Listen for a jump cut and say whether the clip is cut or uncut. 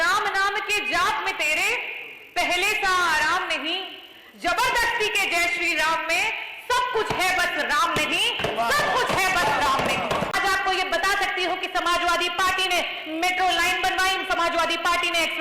cut